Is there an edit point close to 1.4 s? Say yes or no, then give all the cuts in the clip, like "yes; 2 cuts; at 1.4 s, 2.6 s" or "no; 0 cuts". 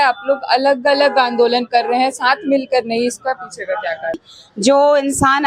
no; 1 cut; at 4.2 s